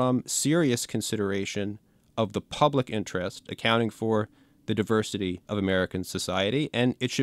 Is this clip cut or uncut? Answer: cut